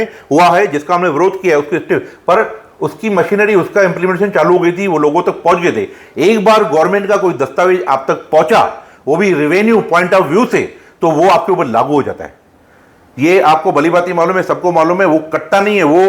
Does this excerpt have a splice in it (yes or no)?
no